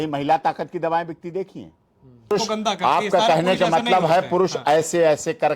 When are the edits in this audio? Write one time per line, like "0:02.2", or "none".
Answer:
0:02.3